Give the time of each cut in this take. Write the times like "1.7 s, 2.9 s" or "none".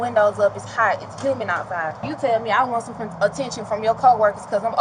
2.0 s